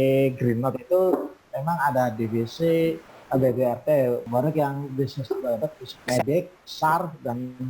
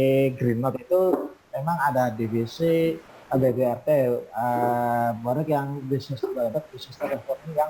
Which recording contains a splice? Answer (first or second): first